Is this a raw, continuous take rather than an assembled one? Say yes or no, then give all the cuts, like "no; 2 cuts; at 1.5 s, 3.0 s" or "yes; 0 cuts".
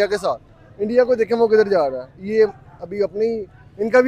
yes; 0 cuts